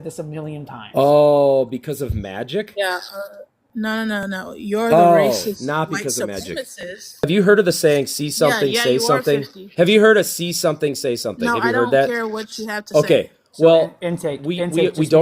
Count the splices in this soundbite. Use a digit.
1